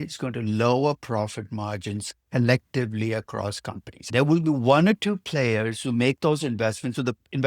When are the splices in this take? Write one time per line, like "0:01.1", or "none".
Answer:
0:03.9